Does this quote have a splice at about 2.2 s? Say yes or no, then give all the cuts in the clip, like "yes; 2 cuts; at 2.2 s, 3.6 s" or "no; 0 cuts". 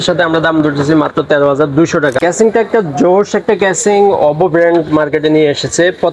yes; 1 cut; at 2.2 s